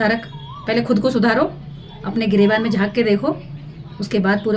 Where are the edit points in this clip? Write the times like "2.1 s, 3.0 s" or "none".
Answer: none

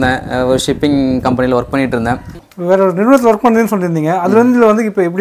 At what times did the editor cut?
2.4 s

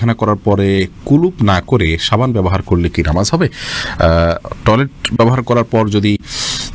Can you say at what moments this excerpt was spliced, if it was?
none

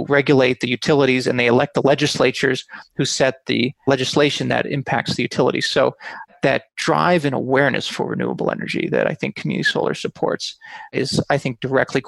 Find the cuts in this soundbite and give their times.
6.3 s

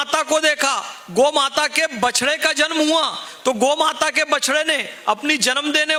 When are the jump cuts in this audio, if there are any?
none

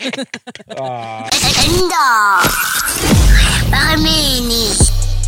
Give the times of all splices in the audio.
1.3 s

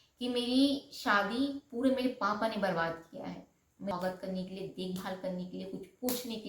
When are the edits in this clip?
3.9 s

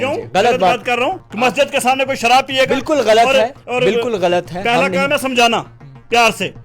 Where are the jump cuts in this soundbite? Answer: 1.2 s

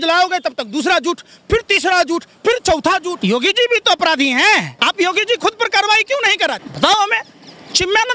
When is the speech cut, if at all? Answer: 3.1 s, 4.7 s, 6.7 s

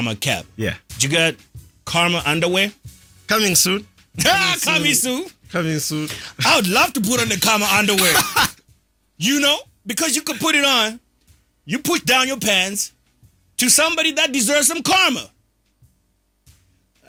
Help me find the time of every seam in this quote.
none

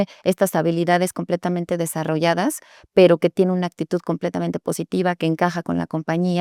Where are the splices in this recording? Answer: none

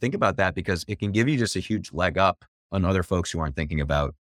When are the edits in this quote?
2.5 s

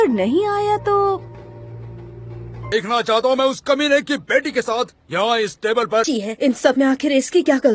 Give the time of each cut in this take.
2.7 s, 6.1 s

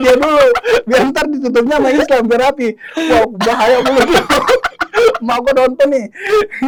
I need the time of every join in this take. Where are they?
none

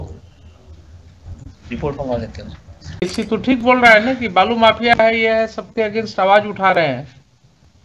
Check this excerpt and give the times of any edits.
3.0 s

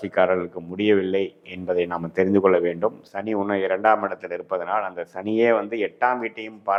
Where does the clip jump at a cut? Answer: none

